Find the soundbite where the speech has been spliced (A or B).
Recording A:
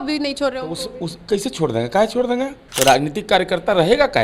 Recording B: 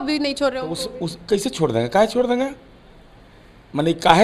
A